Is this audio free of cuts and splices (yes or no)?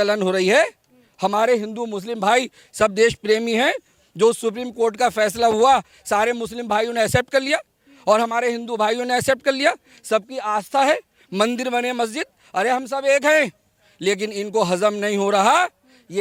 yes